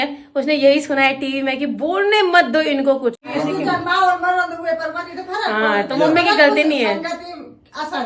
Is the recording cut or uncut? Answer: cut